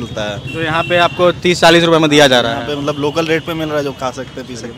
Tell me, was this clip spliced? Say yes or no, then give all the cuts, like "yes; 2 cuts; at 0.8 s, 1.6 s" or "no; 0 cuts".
no; 0 cuts